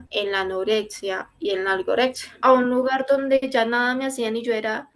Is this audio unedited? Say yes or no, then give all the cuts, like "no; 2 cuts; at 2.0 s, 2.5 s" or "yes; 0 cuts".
no; 1 cut; at 2.3 s